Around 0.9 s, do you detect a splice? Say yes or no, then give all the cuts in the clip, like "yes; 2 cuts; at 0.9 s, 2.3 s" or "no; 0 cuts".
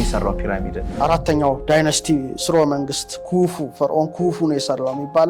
yes; 1 cut; at 0.9 s